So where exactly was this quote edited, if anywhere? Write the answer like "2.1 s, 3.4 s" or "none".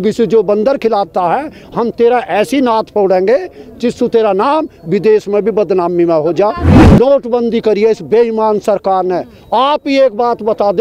6.7 s